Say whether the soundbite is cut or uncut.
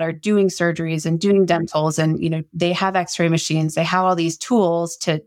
uncut